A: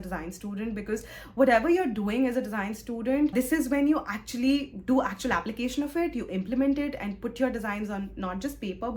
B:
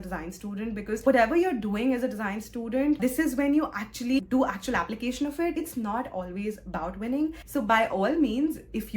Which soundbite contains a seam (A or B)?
B